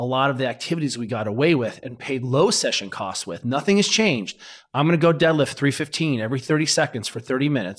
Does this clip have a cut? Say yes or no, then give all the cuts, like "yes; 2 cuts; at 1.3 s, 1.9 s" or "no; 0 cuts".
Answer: no; 0 cuts